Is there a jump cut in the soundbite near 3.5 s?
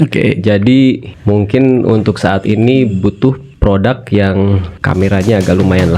yes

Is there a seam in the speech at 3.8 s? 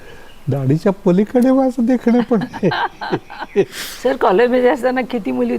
yes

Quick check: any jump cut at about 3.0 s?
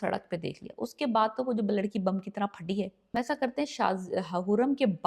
yes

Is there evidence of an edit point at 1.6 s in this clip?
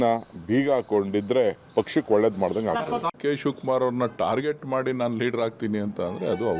no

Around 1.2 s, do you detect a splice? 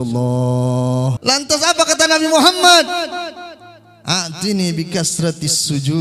yes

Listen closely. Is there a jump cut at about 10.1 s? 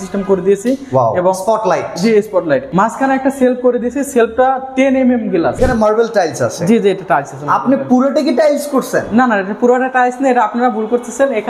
no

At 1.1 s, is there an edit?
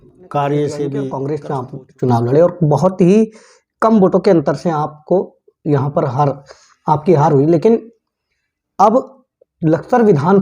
yes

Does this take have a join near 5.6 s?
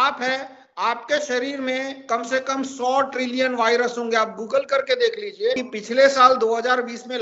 yes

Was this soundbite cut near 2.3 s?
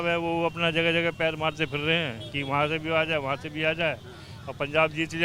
no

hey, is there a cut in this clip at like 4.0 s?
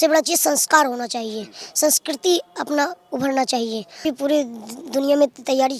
yes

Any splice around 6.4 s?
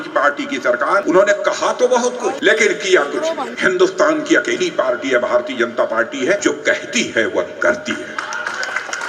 yes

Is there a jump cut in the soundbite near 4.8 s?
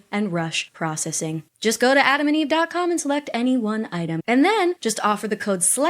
yes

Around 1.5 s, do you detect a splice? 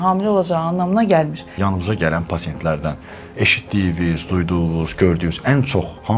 yes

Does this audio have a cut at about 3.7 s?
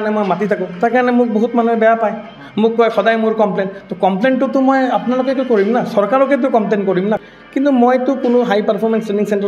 no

